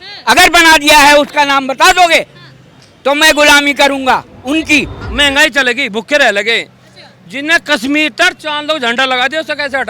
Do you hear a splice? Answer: yes; 1 cut; at 5.0 s

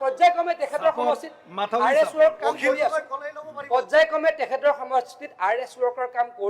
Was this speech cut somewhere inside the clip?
no; 0 cuts

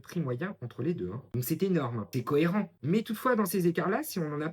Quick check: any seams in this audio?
yes; 2 cuts; at 1.3 s, 2.1 s

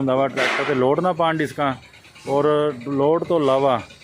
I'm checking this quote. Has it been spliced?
no; 0 cuts

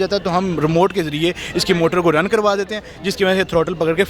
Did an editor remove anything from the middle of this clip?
no; 0 cuts

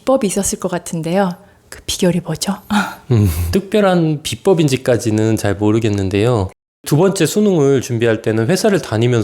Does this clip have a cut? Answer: yes; 2 cuts; at 3.5 s, 6.8 s

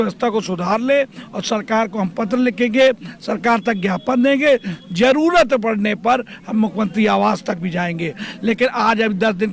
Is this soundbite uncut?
yes; 0 cuts

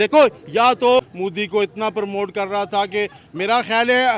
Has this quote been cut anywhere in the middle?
yes; 1 cut; at 1.1 s

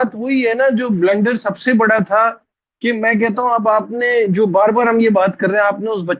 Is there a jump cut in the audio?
no; 0 cuts

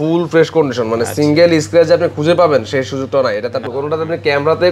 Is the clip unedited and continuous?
no; 1 cut; at 3.7 s

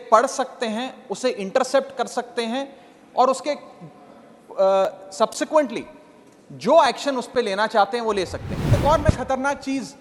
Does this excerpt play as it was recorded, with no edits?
no; 1 cut; at 8.7 s

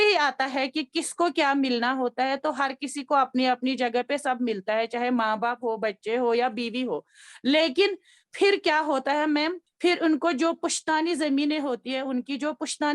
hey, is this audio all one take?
no; 1 cut; at 9.6 s

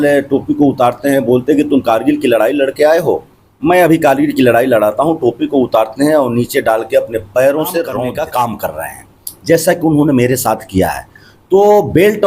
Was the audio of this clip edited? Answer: yes; 1 cut; at 8.0 s

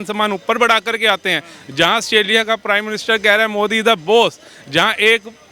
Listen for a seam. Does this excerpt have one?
no; 0 cuts

